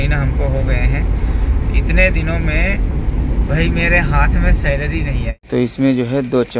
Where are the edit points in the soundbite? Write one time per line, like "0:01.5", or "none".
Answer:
0:05.3